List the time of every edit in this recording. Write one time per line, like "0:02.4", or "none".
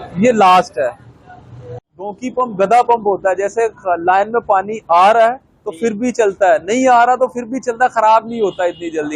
0:01.7